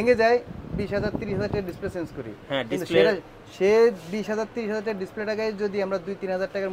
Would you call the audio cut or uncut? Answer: uncut